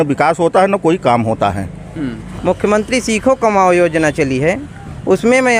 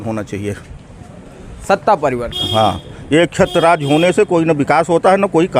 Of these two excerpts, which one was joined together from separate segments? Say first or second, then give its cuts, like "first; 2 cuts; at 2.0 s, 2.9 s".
first; 1 cut; at 2.2 s